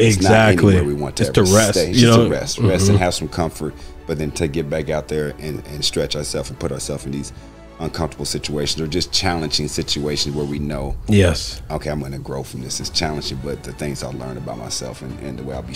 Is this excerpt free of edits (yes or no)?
yes